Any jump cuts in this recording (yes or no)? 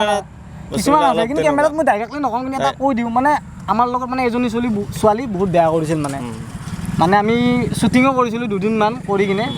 no